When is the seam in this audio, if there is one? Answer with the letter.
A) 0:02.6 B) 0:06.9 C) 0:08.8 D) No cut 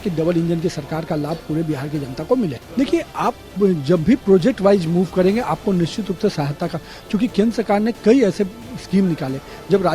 A